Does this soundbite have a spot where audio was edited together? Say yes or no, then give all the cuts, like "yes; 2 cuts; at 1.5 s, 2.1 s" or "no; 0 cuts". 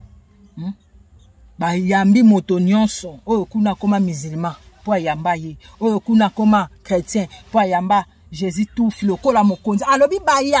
no; 0 cuts